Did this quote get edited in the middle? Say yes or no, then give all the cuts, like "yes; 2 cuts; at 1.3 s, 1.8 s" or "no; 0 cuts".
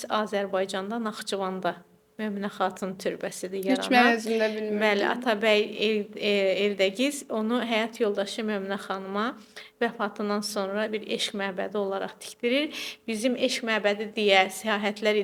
no; 0 cuts